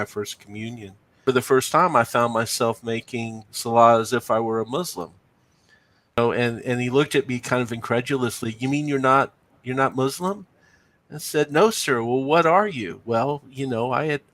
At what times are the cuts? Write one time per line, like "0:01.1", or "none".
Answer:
0:01.0
0:06.2